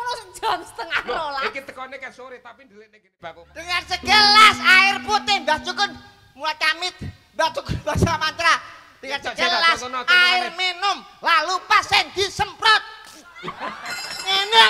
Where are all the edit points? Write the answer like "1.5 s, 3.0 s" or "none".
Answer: 3.7 s